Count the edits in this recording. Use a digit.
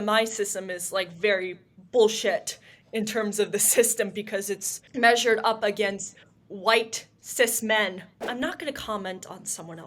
1